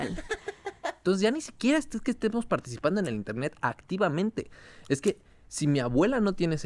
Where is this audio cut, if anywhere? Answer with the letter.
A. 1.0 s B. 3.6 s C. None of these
A